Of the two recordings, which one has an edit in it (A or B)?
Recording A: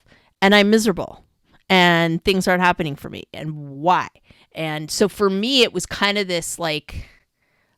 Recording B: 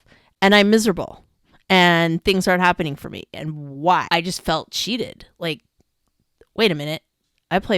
B